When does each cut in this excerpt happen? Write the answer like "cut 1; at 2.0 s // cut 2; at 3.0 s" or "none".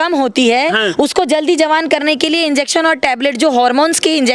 none